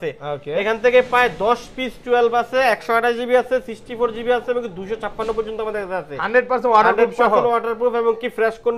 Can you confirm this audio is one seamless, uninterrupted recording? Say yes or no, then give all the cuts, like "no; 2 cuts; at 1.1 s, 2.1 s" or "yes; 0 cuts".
yes; 0 cuts